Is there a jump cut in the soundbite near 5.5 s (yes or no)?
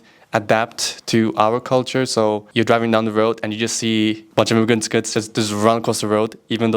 no